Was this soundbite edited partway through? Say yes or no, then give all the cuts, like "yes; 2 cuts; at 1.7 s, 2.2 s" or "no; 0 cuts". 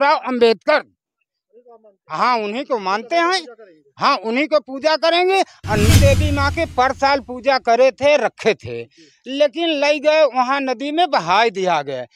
yes; 1 cut; at 6.0 s